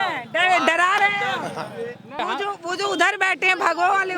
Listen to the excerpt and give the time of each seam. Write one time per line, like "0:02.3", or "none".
0:02.2